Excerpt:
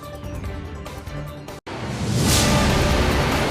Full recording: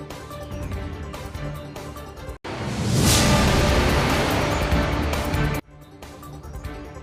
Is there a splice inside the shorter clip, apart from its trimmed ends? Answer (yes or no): yes